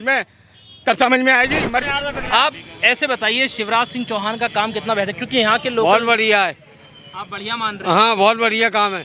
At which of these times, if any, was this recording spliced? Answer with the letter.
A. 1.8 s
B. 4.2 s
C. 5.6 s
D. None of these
A